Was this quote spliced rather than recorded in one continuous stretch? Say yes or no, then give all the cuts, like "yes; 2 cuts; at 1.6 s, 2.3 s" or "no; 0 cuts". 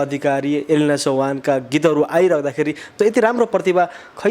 yes; 1 cut; at 2.9 s